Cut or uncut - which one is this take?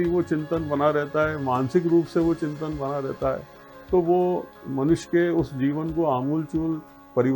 uncut